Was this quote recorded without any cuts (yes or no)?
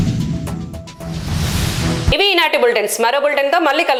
yes